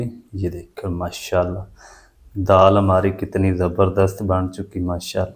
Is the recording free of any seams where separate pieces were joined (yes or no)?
yes